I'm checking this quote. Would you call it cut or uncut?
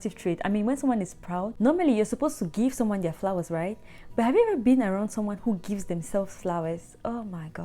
cut